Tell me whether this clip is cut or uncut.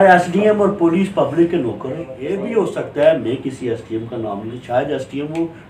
cut